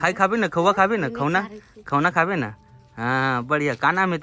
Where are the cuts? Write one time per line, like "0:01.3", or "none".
none